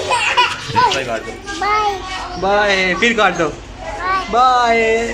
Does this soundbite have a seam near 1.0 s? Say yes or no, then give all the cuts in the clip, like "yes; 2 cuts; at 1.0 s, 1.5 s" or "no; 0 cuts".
yes; 1 cut; at 1.0 s